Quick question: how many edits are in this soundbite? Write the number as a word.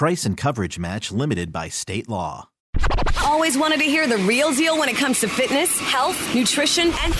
one